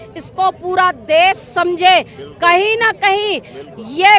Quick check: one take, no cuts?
yes; 0 cuts

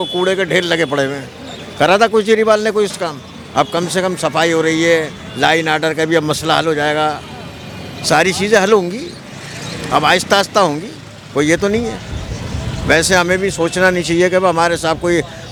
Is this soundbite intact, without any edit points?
yes; 0 cuts

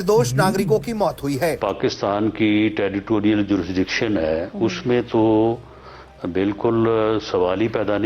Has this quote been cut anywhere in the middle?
yes; 1 cut; at 1.6 s

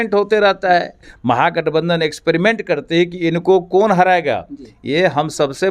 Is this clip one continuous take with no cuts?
no; 1 cut; at 1.1 s

